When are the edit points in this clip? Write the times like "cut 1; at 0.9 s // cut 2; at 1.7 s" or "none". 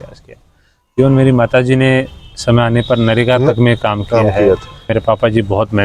cut 1; at 4.9 s